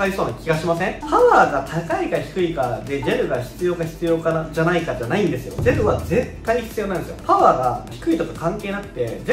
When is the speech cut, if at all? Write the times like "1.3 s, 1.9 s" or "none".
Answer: 1.0 s, 7.1 s